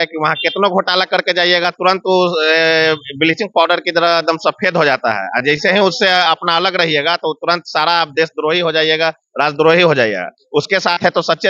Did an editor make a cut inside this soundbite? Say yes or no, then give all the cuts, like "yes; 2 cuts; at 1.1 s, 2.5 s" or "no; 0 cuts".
no; 0 cuts